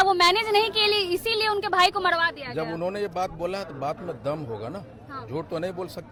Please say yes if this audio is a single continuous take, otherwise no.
yes